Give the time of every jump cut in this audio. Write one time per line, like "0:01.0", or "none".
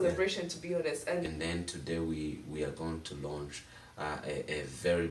0:01.3